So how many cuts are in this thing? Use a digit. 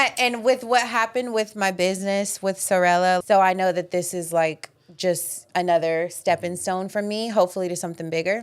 1